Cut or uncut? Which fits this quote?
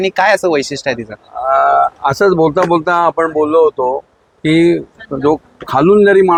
uncut